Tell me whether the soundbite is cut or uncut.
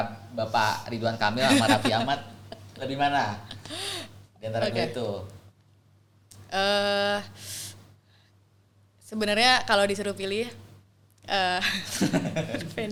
uncut